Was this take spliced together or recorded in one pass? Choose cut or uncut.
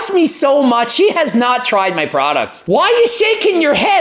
cut